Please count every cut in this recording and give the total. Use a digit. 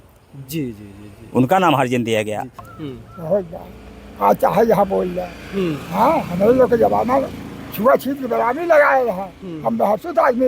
1